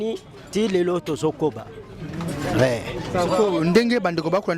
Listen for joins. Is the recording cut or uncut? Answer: uncut